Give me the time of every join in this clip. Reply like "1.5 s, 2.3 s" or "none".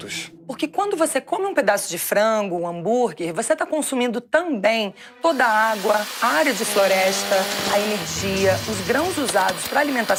none